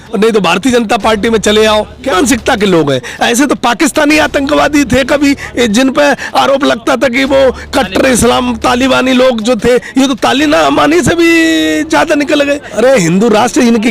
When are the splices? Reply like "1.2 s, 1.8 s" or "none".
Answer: 2.1 s, 12.7 s